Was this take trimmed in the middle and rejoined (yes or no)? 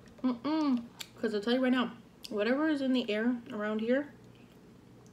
yes